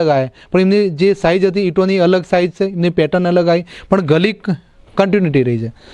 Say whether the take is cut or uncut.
uncut